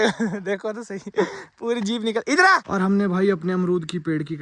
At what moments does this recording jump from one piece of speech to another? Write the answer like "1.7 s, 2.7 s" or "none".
2.6 s